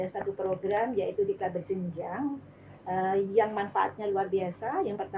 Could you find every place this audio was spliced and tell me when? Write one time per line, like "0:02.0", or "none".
none